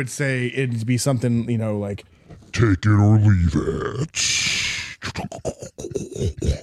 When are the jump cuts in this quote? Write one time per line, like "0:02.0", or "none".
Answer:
none